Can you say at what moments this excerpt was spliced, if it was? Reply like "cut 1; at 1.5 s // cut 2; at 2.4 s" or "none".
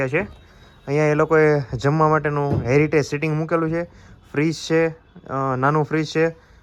none